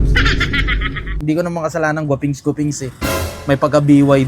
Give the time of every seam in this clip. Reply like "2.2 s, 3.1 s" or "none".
1.2 s